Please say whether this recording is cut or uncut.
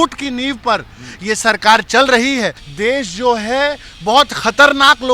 cut